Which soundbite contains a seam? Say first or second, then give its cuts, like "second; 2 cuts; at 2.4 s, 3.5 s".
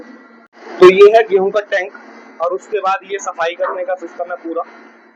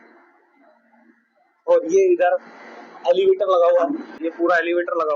second; 1 cut; at 4.1 s